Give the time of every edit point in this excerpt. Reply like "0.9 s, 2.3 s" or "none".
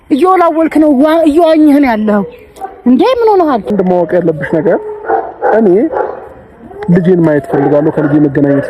3.7 s